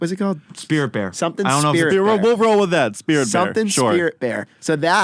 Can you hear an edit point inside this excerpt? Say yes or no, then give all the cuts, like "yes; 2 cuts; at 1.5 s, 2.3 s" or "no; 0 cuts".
no; 0 cuts